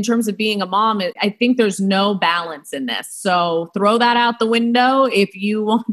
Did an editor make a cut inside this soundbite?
yes; 1 cut; at 1.1 s

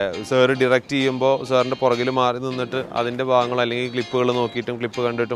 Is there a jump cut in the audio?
no; 0 cuts

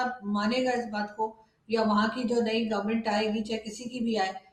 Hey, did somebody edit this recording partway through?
no; 0 cuts

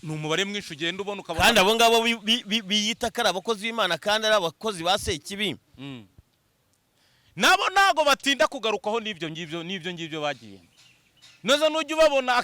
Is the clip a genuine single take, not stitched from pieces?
yes; 0 cuts

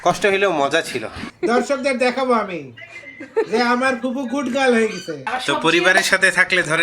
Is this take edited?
yes; 2 cuts; at 1.2 s, 5.1 s

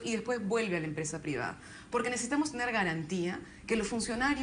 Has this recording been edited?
yes; 1 cut; at 3.1 s

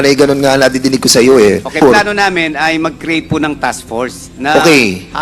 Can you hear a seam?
yes; 1 cut; at 1.8 s

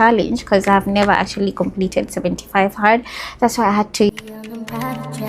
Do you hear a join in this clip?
yes; 1 cut; at 4.1 s

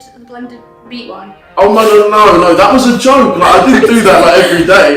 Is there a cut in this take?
no; 0 cuts

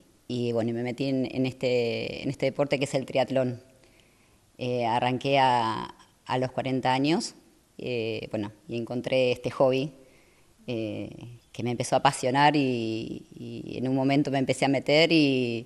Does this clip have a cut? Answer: no; 0 cuts

